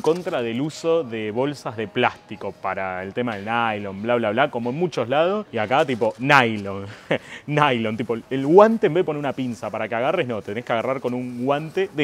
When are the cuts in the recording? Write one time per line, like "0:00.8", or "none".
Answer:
none